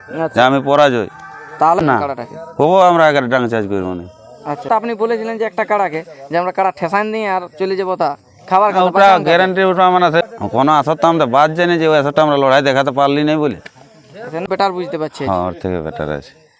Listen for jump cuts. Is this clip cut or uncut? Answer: cut